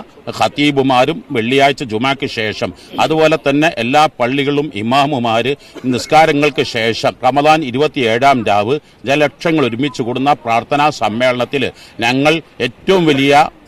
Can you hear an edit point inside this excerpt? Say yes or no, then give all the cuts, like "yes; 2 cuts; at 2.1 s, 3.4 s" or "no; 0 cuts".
yes; 1 cut; at 7.2 s